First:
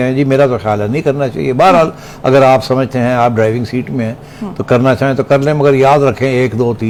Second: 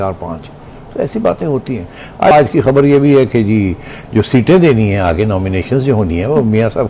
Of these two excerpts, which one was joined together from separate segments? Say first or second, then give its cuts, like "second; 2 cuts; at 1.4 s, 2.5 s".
second; 1 cut; at 2.3 s